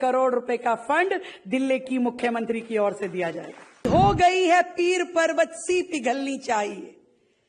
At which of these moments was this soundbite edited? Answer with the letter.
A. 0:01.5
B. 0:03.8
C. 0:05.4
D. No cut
B